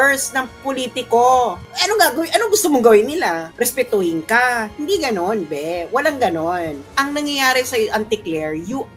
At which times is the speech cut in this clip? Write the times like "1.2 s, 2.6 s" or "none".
none